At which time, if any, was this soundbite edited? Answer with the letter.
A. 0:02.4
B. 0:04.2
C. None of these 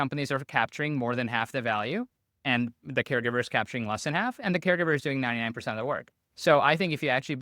A